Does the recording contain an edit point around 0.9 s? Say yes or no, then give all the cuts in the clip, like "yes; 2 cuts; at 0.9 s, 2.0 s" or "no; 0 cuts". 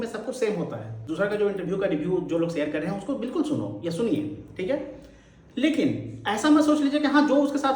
yes; 1 cut; at 0.9 s